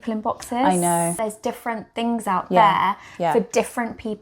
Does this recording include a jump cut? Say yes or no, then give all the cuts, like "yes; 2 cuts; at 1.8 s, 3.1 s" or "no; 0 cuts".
yes; 1 cut; at 1.2 s